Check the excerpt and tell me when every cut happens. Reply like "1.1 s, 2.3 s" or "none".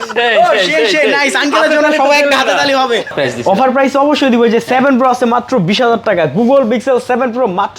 3.1 s